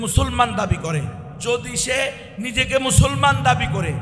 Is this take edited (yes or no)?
yes